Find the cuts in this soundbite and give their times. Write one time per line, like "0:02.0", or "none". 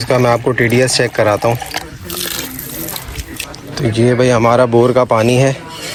none